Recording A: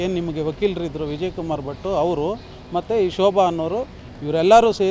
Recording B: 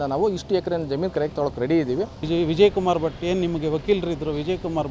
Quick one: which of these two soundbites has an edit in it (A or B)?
B